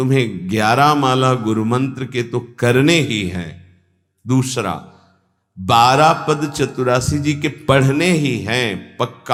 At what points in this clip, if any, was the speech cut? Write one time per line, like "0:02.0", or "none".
none